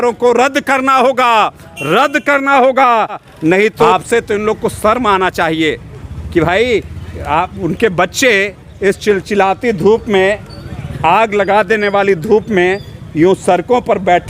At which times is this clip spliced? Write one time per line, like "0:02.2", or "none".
0:03.3

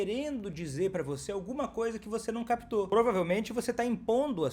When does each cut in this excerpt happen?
0:02.9

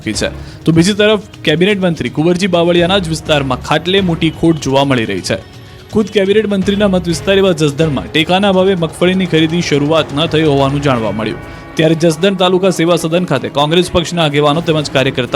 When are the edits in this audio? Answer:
none

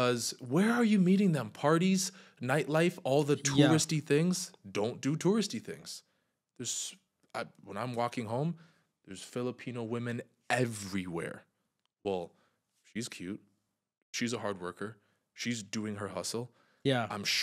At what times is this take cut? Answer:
none

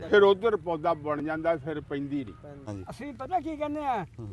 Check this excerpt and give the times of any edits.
0:02.6

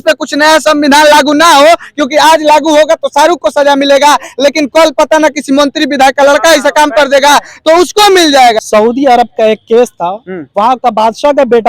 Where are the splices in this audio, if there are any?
0:08.6

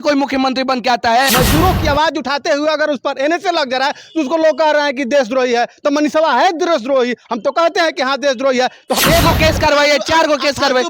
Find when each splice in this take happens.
0:01.3
0:09.0

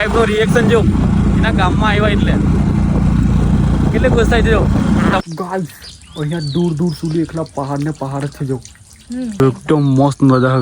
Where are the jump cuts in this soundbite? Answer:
0:05.2
0:09.4

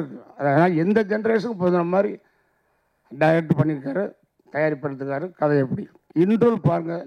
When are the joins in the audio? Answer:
0:06.0

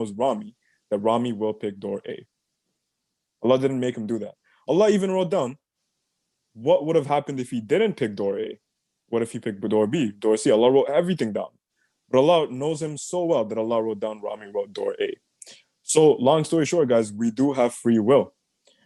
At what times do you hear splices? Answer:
none

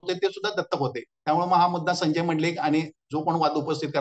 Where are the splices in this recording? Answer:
none

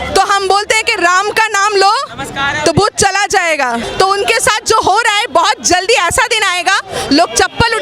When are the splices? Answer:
0:03.9

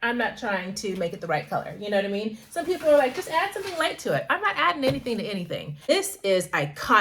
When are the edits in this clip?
0:05.9

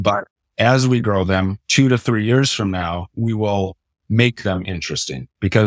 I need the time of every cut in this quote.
none

